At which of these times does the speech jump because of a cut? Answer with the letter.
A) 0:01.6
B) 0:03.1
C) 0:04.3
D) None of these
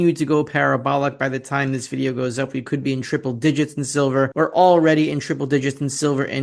C